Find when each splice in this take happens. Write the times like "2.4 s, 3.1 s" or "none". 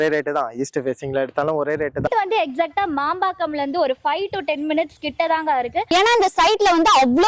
2.1 s, 5.8 s